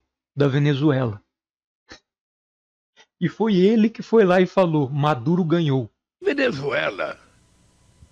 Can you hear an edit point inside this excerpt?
yes; 1 cut; at 6.0 s

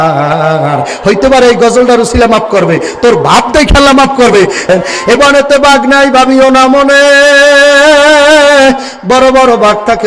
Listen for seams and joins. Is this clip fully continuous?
no; 1 cut; at 4.7 s

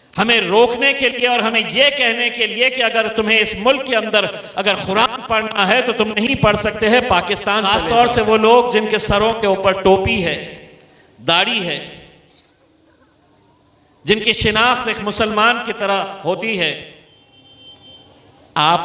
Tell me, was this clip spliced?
yes; 2 cuts; at 7.7 s, 17.1 s

